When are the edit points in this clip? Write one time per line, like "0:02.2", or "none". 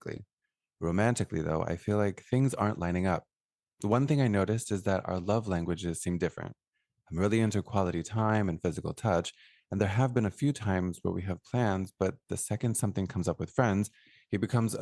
none